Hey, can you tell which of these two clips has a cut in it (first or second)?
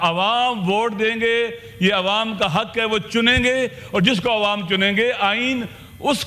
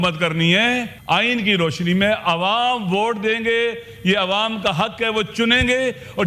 second